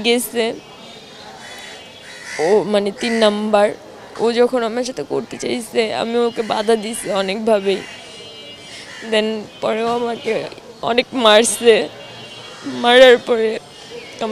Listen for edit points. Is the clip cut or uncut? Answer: uncut